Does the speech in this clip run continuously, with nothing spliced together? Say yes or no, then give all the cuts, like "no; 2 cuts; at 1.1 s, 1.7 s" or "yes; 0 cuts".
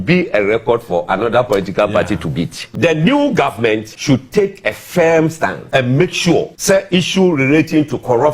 no; 4 cuts; at 2.6 s, 3.9 s, 5.6 s, 6.5 s